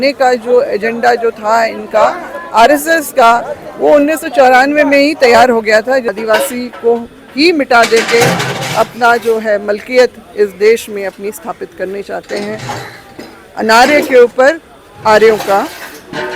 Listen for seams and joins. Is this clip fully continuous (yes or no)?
no